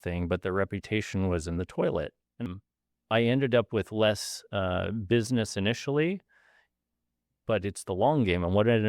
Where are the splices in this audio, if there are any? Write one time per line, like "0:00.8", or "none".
0:02.4